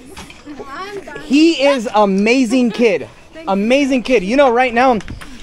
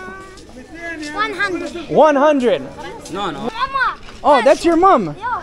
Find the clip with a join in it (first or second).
second